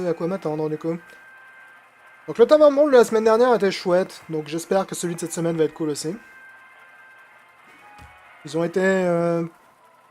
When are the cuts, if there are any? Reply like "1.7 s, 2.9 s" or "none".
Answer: 1.6 s